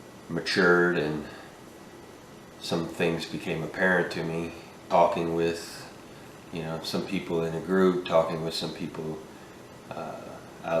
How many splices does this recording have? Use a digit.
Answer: 1